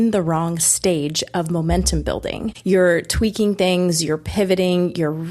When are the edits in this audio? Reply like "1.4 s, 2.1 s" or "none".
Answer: 2.5 s